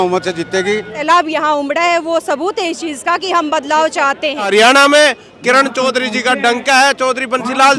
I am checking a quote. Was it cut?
yes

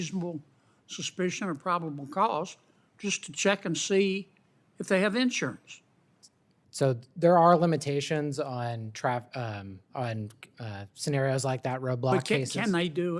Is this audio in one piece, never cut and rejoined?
yes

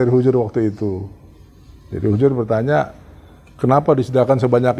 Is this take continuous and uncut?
yes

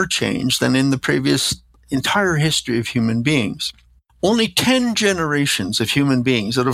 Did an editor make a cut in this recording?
no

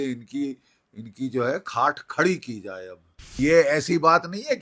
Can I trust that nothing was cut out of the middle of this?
no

